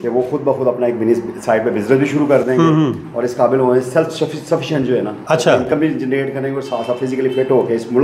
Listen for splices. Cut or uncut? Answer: uncut